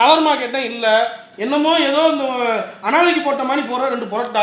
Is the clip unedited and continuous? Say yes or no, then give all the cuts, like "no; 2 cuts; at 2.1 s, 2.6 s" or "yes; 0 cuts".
yes; 0 cuts